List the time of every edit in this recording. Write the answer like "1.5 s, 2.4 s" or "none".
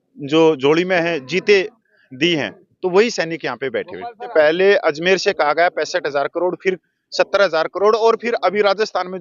4.3 s

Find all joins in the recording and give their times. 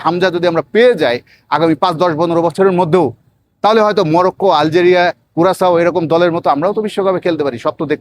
none

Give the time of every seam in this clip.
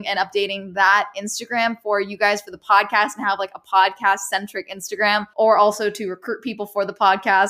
5.3 s

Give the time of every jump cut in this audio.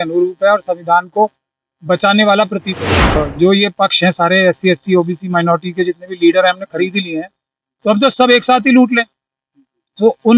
3.2 s

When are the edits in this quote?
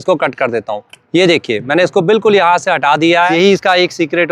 3.3 s

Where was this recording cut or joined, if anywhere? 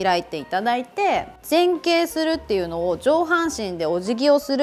1.3 s

